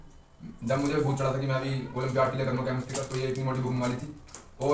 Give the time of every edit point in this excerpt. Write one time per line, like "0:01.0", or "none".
none